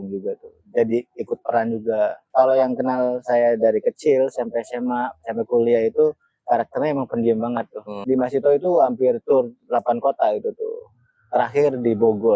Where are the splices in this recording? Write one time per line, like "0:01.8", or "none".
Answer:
0:02.2
0:07.9